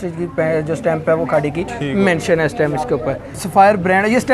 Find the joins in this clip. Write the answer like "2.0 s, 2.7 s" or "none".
3.4 s